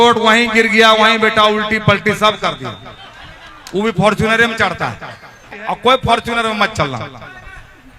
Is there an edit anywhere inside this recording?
yes; 1 cut; at 5.8 s

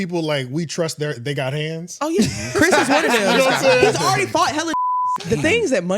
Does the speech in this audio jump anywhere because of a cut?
yes; 1 cut; at 4.9 s

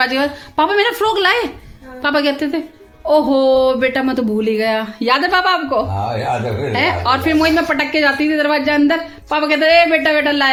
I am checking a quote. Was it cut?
no; 0 cuts

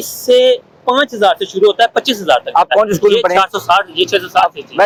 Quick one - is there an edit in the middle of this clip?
no; 0 cuts

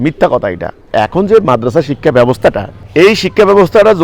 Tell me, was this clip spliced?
yes; 2 cuts; at 0.9 s, 2.7 s

